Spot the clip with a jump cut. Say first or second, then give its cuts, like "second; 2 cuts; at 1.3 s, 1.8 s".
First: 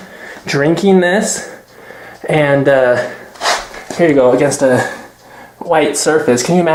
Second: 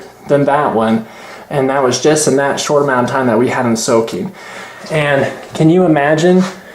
second; 1 cut; at 4.8 s